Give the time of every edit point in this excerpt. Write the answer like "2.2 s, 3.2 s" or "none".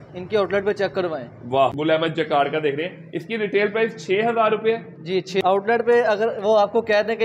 1.7 s, 5.4 s